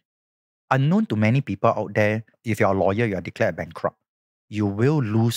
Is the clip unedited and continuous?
no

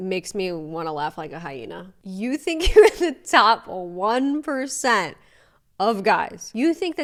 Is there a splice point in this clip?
no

